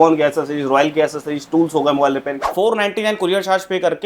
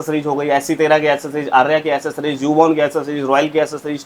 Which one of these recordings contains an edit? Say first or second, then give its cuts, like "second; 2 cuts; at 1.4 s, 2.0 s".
first; 1 cut; at 2.5 s